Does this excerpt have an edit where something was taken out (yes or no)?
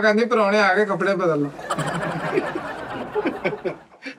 no